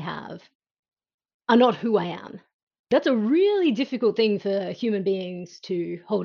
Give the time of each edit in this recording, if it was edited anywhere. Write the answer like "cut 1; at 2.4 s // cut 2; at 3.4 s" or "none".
cut 1; at 2.8 s